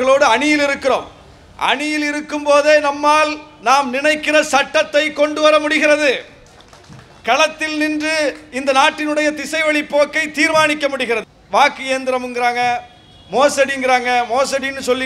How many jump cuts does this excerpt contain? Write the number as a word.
one